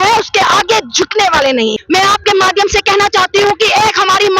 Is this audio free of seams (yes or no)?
no